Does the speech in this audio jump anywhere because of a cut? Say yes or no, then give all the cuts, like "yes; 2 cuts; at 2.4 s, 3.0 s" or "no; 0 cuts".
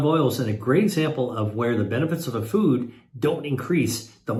no; 0 cuts